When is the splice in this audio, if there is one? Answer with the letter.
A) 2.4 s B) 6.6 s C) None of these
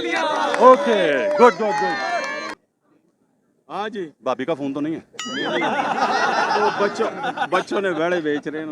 A